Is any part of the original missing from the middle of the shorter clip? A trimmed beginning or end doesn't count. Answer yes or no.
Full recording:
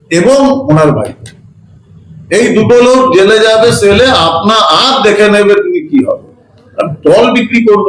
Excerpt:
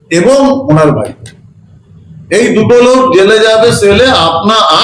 no